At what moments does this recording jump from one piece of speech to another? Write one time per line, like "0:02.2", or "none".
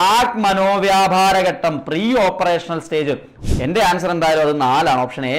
0:03.3